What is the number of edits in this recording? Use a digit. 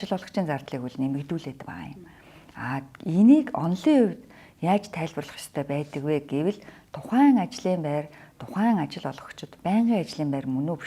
0